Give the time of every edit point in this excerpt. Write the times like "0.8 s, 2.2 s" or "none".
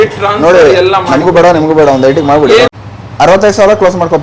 2.7 s